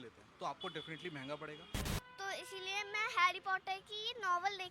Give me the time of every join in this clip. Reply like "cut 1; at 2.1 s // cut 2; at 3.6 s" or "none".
cut 1; at 1.9 s